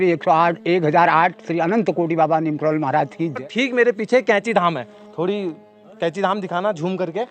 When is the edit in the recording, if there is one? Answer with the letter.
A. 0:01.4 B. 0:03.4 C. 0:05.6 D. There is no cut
B